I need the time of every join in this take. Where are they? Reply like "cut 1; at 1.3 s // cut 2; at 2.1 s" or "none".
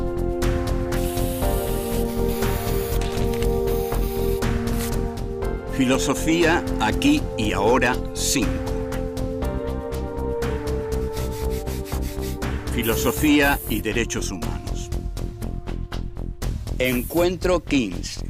cut 1; at 7.2 s